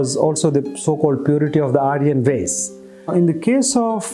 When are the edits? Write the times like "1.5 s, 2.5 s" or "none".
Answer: none